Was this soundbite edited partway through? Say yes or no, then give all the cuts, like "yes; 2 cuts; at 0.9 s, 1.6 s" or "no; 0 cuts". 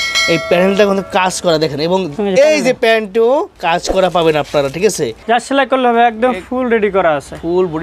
yes; 2 cuts; at 3.5 s, 5.1 s